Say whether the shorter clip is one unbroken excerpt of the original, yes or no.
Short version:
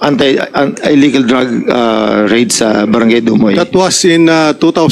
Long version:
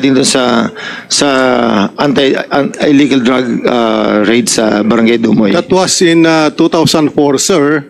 yes